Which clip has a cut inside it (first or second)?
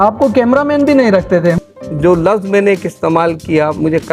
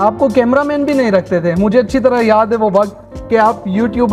first